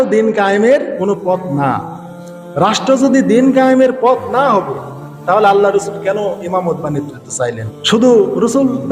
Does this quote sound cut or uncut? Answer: cut